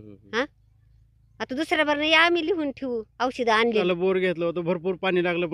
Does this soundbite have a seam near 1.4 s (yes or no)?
no